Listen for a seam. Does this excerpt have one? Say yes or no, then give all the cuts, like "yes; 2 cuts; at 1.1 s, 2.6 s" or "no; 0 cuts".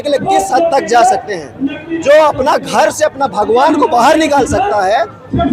no; 0 cuts